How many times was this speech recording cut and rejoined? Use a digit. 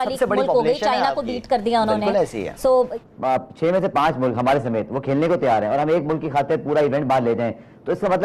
1